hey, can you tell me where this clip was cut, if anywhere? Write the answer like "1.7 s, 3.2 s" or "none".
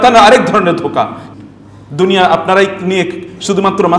1.2 s